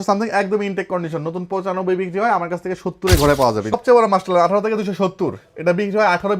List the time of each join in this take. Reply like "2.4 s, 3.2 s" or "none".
3.7 s